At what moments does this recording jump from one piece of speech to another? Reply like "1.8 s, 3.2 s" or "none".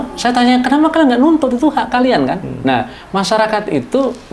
none